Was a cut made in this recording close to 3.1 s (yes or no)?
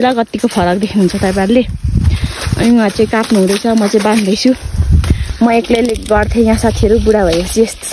no